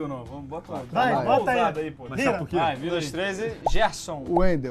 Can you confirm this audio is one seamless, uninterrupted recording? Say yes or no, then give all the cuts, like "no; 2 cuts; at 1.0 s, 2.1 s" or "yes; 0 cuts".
no; 1 cut; at 2.1 s